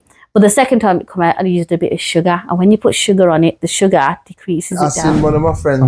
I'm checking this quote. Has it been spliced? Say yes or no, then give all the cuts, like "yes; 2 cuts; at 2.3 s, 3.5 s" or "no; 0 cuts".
yes; 1 cut; at 4.8 s